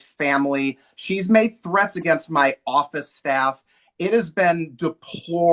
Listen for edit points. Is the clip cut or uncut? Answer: uncut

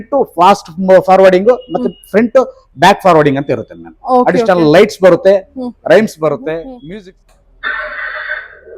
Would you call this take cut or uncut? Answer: cut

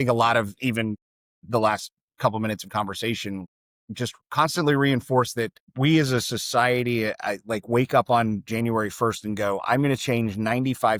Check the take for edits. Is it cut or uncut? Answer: uncut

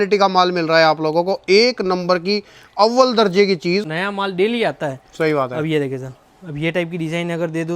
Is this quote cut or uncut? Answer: cut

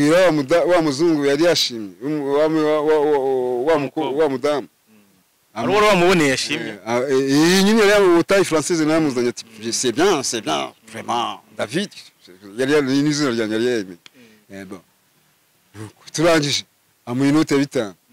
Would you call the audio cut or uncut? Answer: uncut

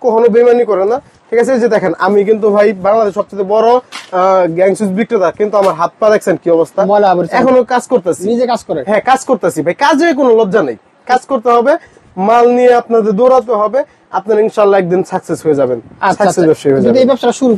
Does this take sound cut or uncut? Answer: uncut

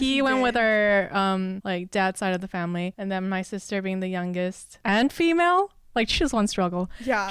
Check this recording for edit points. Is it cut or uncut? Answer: cut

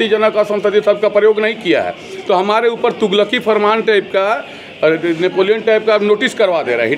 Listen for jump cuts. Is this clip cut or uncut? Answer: uncut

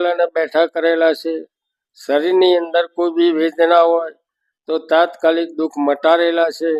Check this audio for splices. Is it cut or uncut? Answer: uncut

